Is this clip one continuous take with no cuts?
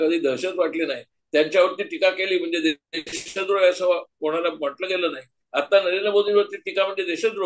yes; 0 cuts

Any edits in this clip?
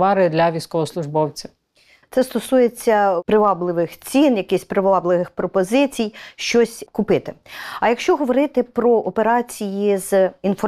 no; 0 cuts

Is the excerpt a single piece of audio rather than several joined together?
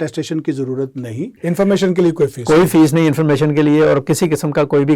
no; 1 cut; at 1.3 s

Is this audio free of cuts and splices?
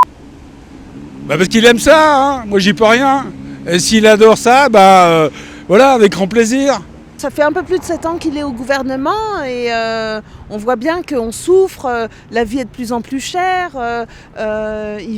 no; 1 cut; at 7.2 s

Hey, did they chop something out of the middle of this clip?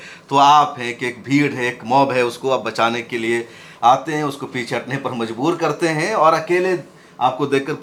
no; 0 cuts

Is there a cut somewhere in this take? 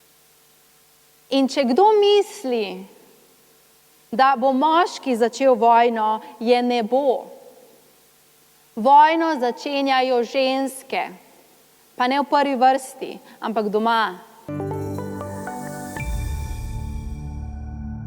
yes; 1 cut; at 14.3 s

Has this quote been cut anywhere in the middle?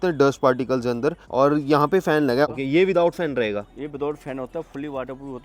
yes; 2 cuts; at 1.2 s, 2.5 s

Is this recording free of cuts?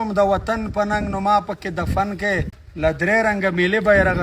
no; 1 cut; at 2.6 s

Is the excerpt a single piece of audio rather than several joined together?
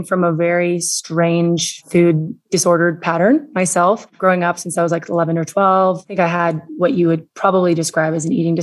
no; 1 cut; at 1.8 s

